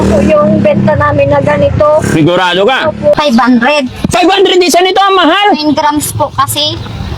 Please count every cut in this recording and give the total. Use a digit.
1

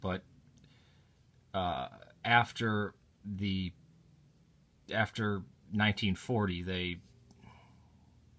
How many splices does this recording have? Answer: 0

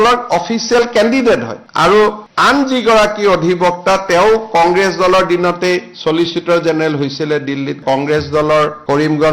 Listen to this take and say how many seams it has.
1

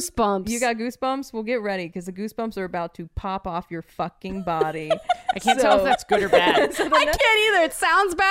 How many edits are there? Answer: 0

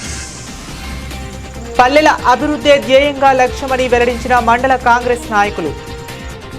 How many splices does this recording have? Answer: 1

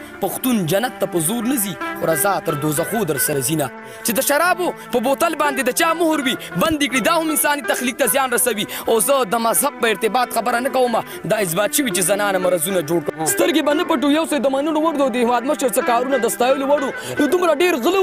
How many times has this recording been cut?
2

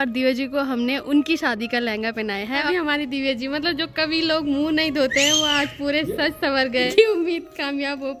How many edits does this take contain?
2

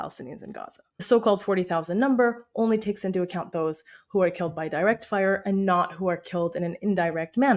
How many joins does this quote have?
1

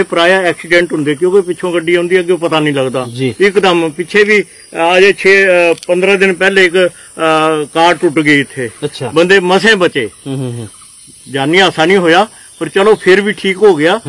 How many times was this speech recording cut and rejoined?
0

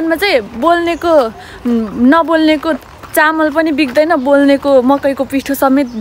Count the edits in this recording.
0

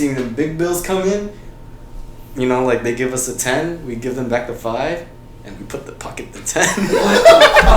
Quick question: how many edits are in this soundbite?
0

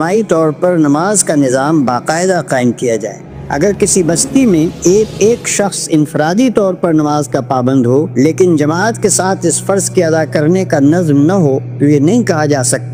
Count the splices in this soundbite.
0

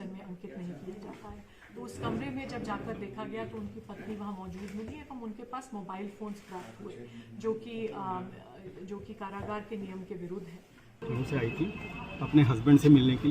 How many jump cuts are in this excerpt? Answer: 1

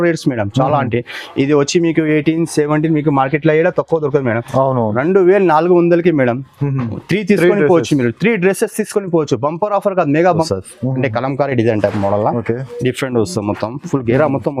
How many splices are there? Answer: 1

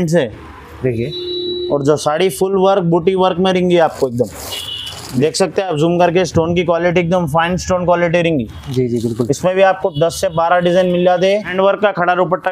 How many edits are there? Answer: 1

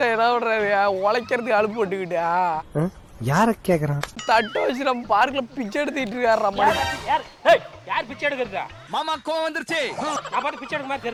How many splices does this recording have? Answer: 0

